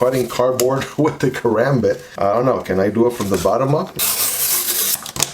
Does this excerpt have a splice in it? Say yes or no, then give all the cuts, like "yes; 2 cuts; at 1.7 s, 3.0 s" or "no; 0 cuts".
yes; 1 cut; at 3.9 s